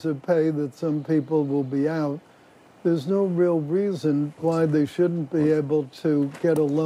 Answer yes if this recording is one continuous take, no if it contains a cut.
yes